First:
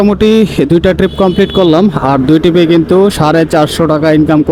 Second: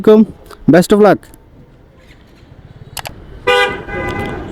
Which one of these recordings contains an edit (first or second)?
second